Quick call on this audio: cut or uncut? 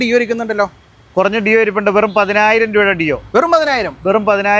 uncut